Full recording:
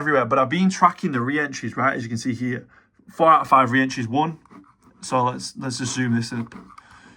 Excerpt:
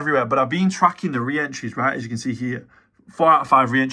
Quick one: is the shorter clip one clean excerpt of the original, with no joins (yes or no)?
yes